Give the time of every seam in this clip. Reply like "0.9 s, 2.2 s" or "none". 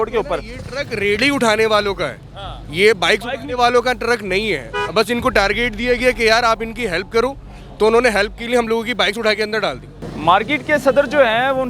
9.9 s